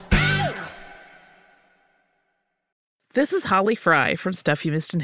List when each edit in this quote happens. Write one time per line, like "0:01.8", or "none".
0:02.7